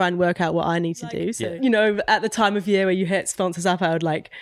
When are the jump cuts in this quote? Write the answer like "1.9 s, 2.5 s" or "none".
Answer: 1.3 s

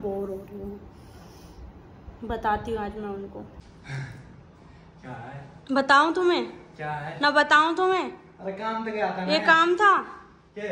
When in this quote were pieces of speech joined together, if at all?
3.6 s

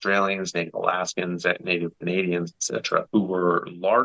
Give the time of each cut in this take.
2.0 s, 3.1 s

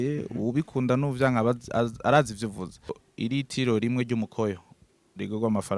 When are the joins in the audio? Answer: 3.0 s

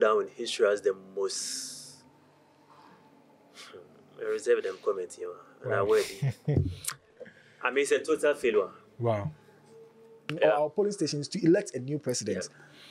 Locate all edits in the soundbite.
10.3 s

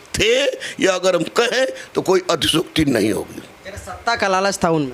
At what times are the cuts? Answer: none

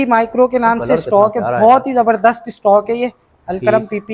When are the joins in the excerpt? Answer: none

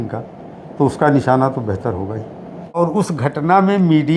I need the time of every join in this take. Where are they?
2.8 s

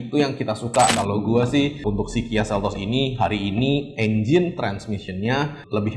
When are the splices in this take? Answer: 0.9 s

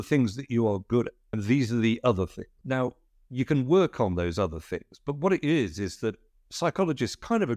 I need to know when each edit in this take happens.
1.2 s, 2.5 s

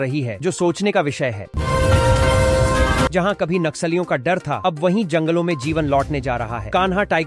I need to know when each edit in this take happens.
1.5 s, 3.1 s

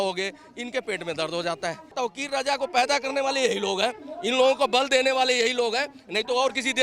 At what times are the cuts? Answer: 1.9 s

